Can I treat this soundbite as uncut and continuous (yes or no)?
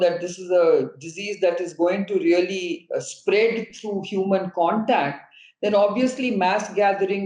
yes